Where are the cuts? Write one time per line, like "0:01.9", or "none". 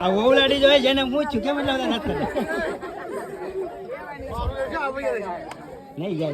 none